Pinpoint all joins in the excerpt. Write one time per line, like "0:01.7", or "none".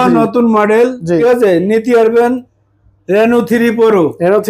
0:01.2